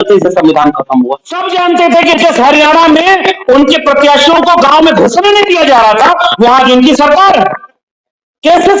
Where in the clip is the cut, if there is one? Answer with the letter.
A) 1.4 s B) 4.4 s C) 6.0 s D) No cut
A